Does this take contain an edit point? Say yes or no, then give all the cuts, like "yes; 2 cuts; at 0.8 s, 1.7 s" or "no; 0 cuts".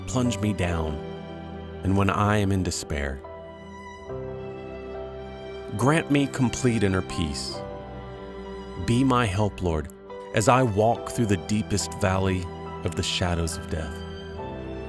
yes; 2 cuts; at 3.8 s, 5.7 s